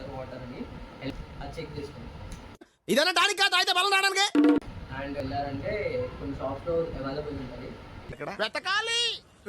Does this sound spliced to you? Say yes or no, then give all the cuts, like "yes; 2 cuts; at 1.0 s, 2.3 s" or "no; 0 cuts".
yes; 2 cuts; at 0.9 s, 5.2 s